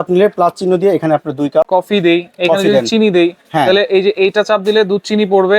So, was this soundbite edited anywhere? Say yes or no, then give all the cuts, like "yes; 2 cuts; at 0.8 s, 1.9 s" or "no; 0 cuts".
yes; 1 cut; at 1.7 s